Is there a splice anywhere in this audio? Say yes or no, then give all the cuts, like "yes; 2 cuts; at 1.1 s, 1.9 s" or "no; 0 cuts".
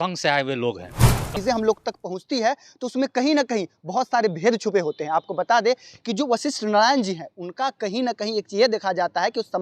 yes; 1 cut; at 1.3 s